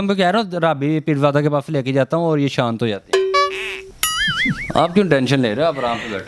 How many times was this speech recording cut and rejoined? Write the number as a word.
zero